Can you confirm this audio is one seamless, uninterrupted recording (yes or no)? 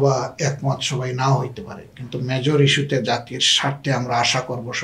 yes